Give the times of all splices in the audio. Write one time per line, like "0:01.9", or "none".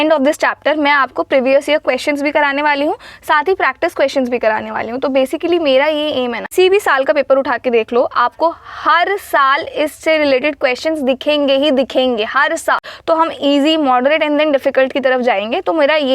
0:06.5
0:12.9